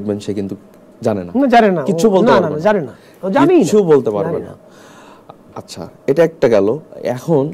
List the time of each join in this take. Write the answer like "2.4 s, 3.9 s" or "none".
4.8 s